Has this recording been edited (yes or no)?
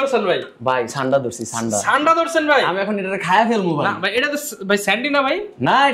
no